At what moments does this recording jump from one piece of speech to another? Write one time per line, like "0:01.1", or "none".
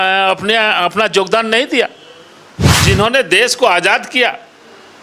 0:02.8